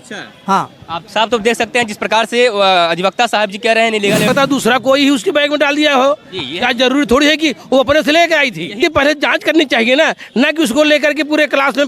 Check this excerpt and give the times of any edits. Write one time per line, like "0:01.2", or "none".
0:04.3
0:08.8